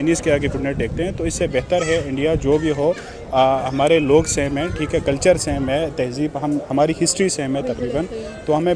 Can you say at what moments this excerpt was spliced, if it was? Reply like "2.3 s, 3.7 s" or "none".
none